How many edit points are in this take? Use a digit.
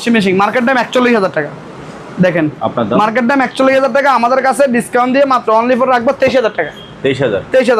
0